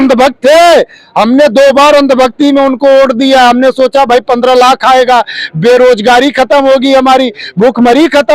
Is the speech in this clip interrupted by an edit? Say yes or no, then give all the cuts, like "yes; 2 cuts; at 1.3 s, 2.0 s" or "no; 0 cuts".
no; 0 cuts